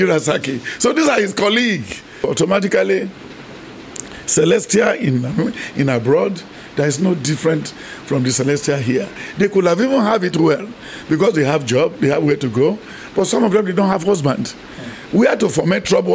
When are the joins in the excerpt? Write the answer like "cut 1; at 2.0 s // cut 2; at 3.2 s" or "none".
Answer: cut 1; at 2.2 s